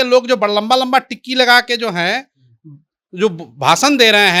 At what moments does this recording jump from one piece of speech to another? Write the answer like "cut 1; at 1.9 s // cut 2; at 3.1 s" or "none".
none